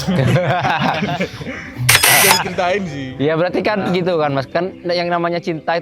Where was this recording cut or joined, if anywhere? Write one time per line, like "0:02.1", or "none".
0:02.1